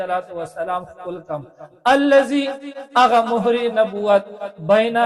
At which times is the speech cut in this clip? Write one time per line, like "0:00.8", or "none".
none